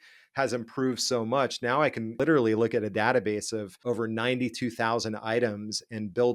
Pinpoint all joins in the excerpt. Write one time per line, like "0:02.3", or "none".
0:02.1
0:03.7